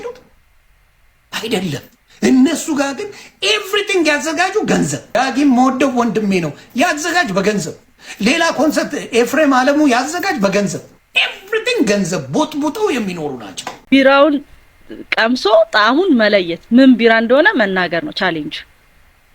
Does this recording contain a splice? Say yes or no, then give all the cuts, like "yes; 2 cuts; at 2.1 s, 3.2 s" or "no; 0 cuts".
yes; 2 cuts; at 5.0 s, 13.7 s